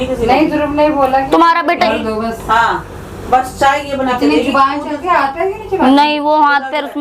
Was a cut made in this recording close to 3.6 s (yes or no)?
no